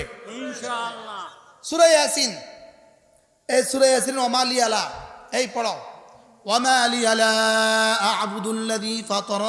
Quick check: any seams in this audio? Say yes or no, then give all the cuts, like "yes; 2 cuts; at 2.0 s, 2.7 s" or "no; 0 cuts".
no; 0 cuts